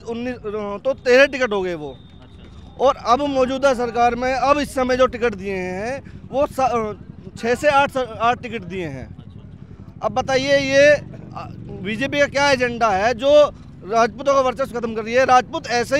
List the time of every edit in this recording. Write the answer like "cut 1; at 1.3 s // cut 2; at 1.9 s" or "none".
none

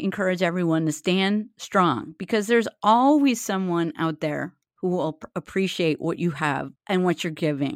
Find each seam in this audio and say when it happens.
none

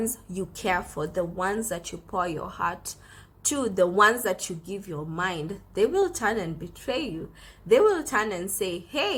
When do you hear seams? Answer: none

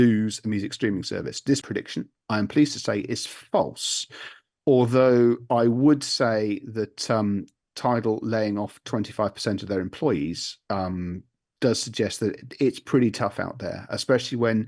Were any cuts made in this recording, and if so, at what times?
cut 1; at 1.7 s

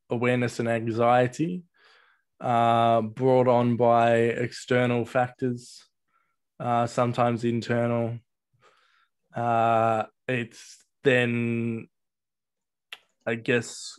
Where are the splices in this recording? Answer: none

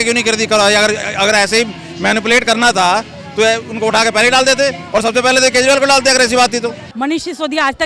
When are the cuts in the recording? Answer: cut 1; at 6.8 s

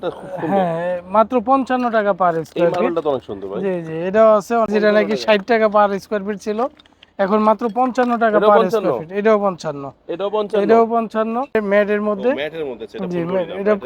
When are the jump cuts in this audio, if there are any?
cut 1; at 4.7 s // cut 2; at 11.5 s

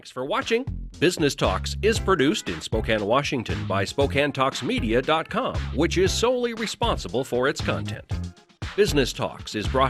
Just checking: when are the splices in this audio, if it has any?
none

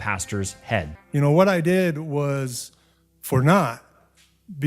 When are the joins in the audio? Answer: cut 1; at 0.9 s

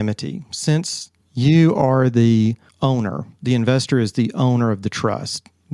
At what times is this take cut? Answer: none

